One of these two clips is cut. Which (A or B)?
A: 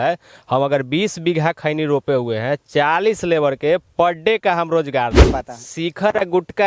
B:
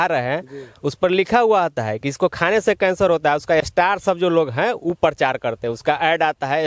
A